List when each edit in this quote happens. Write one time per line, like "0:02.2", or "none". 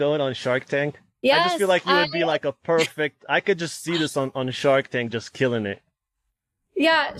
0:01.0